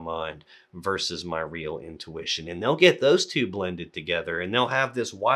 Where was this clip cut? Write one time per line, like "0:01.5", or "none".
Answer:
none

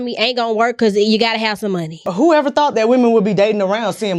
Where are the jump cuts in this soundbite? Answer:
0:02.1

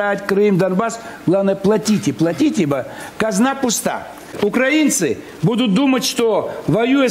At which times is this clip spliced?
0:04.3

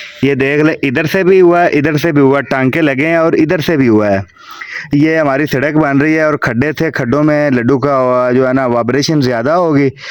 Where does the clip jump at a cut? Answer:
none

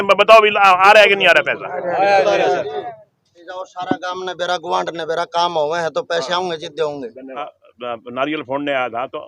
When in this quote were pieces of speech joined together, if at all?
0:03.4
0:07.6

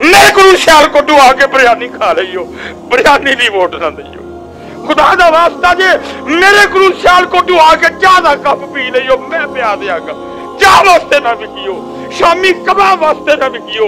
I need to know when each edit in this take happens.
none

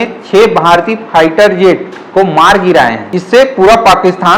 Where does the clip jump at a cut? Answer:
0:03.1

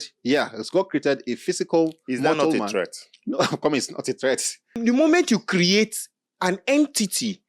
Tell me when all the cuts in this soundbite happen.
0:04.8

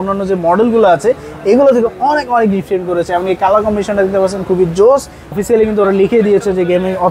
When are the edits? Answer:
0:05.4

